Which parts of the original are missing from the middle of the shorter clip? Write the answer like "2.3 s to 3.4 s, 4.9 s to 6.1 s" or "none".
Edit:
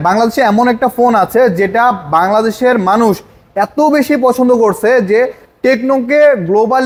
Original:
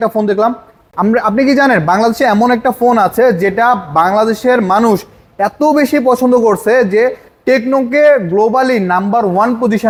none